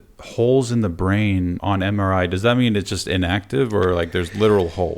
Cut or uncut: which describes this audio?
cut